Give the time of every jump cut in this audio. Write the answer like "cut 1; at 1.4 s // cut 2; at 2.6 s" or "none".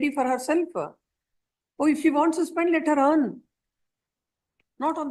none

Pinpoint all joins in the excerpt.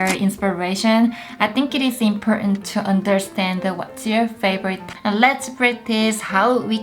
cut 1; at 4.9 s

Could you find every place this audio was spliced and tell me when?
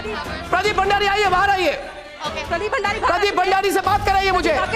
none

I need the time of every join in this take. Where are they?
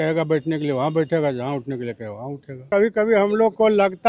cut 1; at 2.7 s

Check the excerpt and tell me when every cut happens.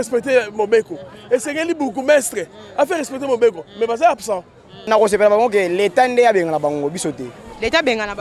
cut 1; at 4.9 s

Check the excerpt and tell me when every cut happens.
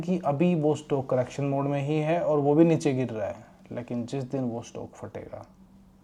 none

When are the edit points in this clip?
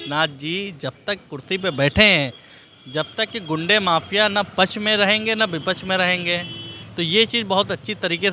none

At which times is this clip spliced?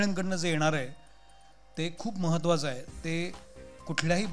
none

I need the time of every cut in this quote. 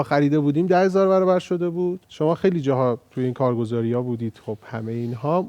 cut 1; at 2.1 s

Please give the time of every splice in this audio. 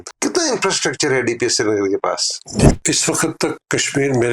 cut 1; at 2.7 s

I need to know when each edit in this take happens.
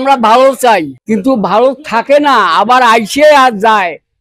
cut 1; at 0.9 s

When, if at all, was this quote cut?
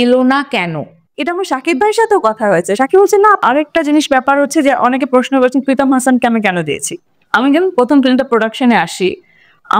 cut 1; at 1.1 s // cut 2; at 3.4 s

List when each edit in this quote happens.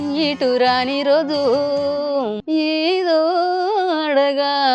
cut 1; at 2.4 s

